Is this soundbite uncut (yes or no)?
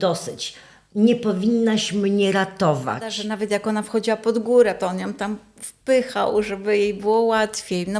no